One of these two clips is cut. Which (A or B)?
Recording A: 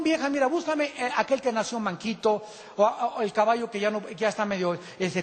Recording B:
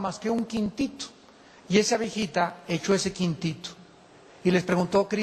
B